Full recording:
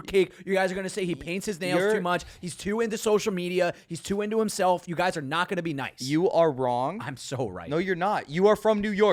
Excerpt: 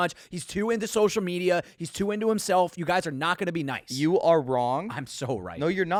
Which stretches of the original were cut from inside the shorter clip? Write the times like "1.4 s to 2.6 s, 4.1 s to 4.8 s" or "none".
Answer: none